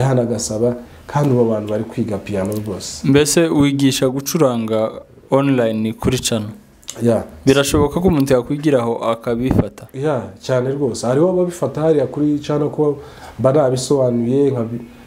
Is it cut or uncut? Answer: cut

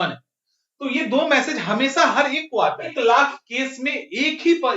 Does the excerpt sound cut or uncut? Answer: cut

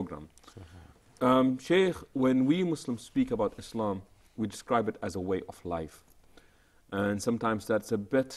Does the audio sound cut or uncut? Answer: uncut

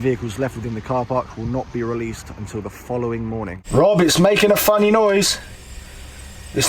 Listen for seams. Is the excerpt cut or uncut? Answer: cut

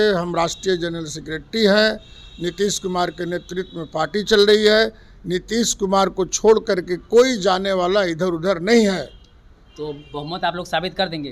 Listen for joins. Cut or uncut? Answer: uncut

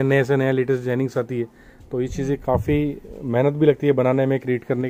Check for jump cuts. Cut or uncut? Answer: uncut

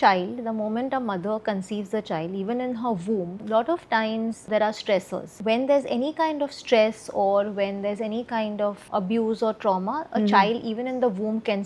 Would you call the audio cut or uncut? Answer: cut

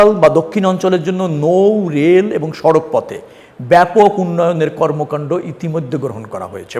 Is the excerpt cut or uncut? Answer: uncut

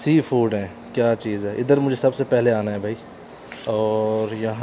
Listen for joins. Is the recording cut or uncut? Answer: uncut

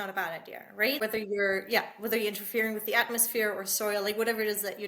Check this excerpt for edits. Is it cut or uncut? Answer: cut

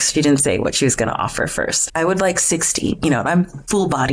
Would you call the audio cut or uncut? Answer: cut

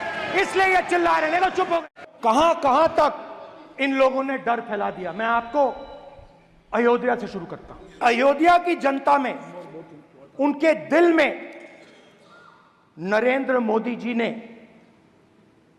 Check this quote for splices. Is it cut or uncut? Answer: cut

